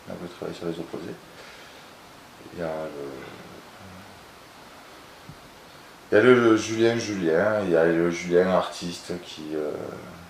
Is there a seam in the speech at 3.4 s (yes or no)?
yes